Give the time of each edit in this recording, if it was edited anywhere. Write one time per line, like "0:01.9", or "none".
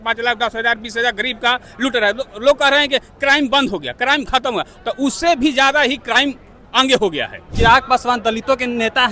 0:07.4